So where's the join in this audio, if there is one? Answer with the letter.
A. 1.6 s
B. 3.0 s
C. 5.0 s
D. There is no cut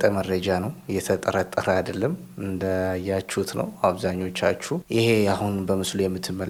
D